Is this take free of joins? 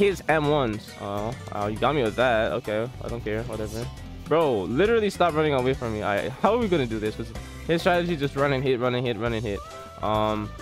no; 1 cut; at 0.9 s

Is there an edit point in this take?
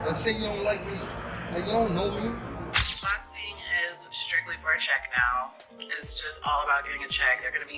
yes; 1 cut; at 2.7 s

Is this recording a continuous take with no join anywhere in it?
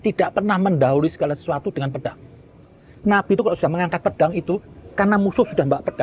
yes; 0 cuts

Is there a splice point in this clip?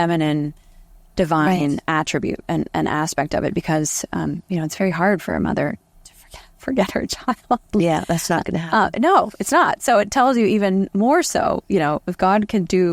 no; 0 cuts

